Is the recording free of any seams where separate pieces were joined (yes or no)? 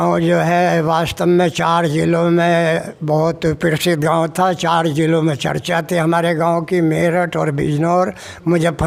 yes